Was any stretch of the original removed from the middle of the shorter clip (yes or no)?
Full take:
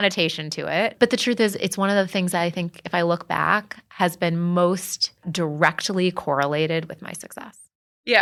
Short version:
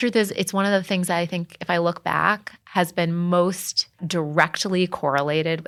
no